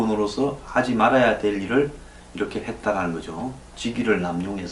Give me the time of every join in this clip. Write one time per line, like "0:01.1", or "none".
none